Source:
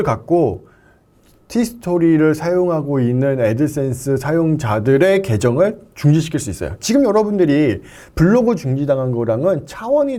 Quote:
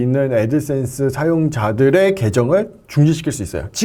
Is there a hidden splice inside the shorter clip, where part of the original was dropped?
no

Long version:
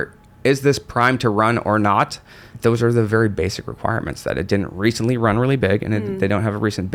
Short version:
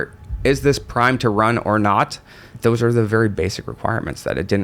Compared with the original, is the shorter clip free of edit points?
yes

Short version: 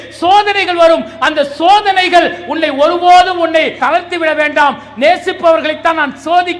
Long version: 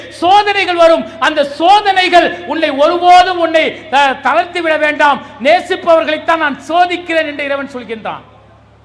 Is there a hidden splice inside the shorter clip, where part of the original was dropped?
yes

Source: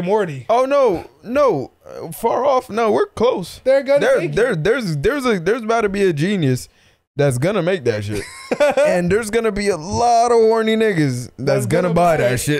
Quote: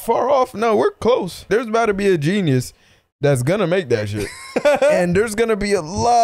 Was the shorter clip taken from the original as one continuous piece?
no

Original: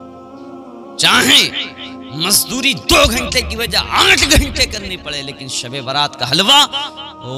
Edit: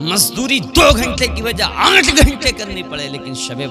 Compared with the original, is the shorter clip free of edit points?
yes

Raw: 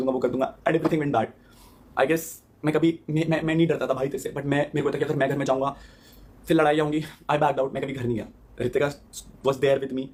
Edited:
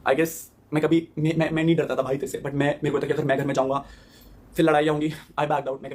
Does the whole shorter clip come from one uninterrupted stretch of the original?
yes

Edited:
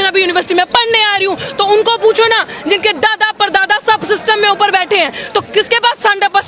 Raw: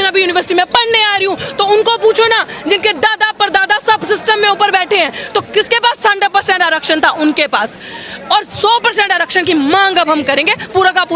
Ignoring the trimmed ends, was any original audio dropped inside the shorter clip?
no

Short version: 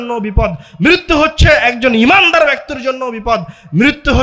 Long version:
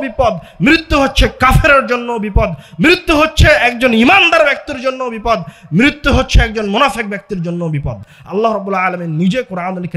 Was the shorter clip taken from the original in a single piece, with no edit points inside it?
yes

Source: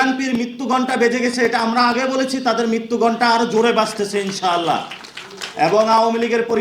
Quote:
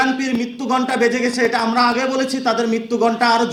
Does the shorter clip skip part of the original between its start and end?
no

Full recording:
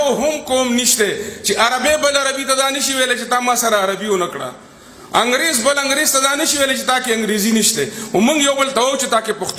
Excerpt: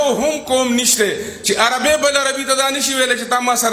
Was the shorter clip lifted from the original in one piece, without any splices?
yes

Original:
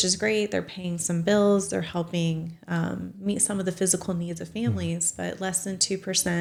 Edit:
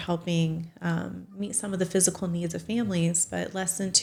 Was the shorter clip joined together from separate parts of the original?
no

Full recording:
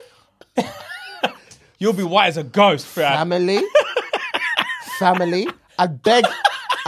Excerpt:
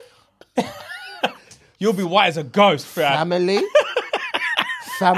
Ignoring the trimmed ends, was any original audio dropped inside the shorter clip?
no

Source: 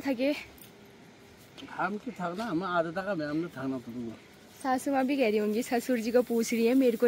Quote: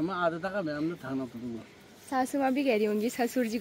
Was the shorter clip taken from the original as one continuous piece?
yes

